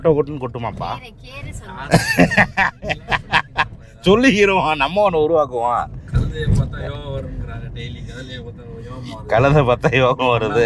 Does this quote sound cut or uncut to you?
uncut